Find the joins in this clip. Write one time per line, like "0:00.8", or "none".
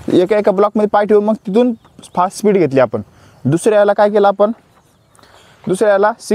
none